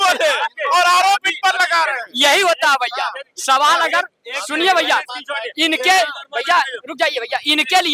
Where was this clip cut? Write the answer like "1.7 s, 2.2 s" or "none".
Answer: none

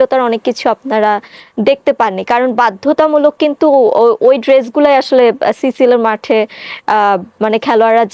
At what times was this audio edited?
none

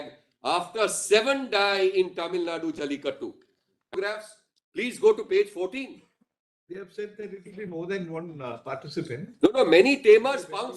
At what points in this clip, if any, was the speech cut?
3.9 s

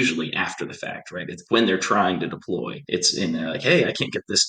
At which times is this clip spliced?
1.4 s, 2.8 s

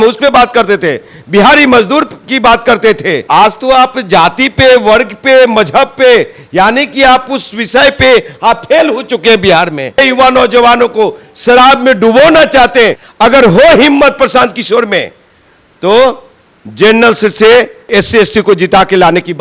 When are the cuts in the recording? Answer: 3.2 s, 10.0 s, 13.0 s, 17.9 s

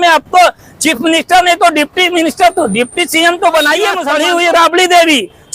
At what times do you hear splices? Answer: 4.1 s

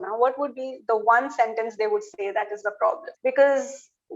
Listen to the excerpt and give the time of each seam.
3.1 s

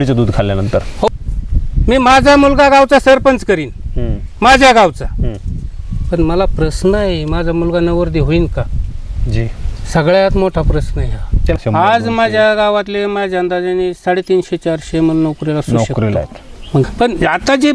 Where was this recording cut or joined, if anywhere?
1.1 s, 11.6 s, 16.9 s

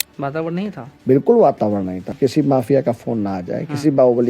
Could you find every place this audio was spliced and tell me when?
2.0 s

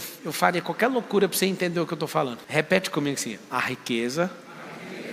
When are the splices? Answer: 2.4 s

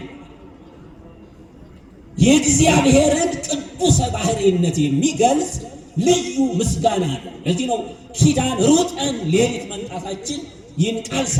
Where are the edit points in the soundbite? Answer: none

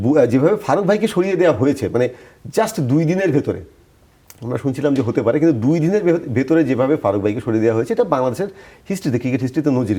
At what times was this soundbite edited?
none

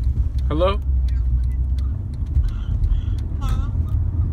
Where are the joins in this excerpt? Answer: none

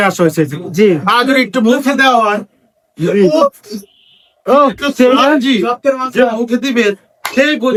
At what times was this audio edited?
none

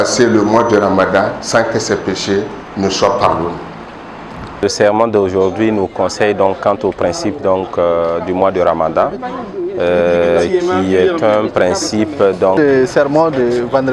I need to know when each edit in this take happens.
4.6 s, 12.6 s

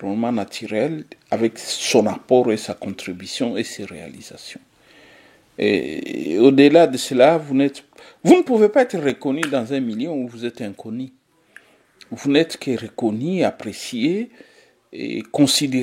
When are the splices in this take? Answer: none

